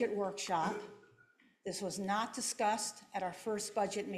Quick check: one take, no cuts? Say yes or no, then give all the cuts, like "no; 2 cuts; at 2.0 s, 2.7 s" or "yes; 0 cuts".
yes; 0 cuts